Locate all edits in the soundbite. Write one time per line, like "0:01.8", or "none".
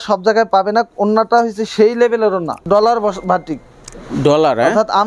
0:02.6